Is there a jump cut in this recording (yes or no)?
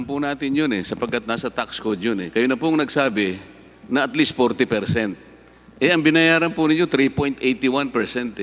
no